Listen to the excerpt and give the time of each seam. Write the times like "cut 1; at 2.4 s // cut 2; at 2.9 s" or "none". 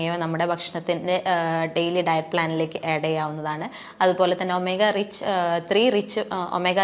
none